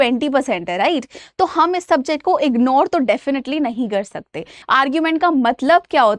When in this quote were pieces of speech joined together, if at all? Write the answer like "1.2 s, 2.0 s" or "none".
4.5 s